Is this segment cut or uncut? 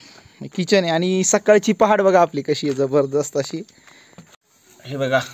cut